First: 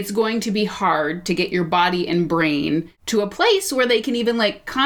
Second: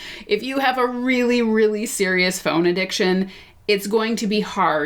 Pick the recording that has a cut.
first; 1 cut; at 3.0 s

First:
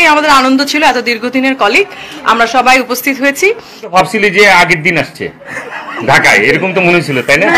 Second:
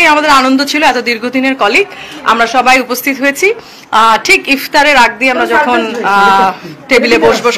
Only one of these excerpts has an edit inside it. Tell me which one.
first; 1 cut; at 3.9 s

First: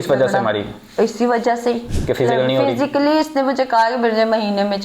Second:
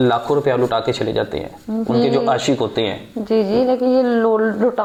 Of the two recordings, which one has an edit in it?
first; 1 cut; at 1.9 s

